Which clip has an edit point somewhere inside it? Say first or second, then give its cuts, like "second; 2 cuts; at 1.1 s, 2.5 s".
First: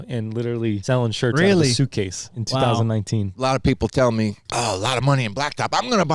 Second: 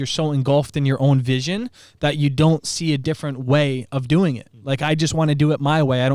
first; 4 cuts; at 0.8 s, 2.4 s, 3.3 s, 4.4 s